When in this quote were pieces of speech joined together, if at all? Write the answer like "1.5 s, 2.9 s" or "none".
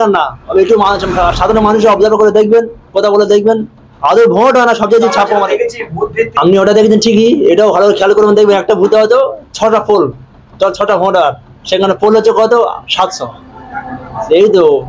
6.3 s